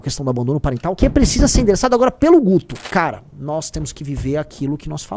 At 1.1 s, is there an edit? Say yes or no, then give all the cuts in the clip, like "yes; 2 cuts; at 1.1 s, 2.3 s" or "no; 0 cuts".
no; 1 cut; at 2.8 s